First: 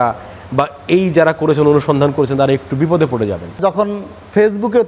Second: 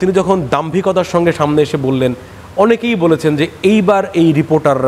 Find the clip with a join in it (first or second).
first